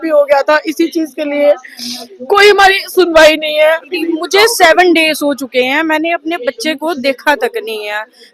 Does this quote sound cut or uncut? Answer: cut